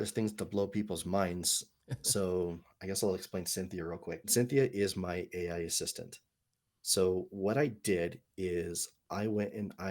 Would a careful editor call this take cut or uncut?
cut